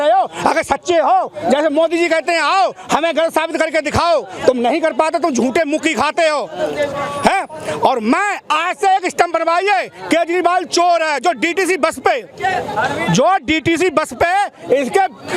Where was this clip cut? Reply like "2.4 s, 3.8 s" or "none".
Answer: none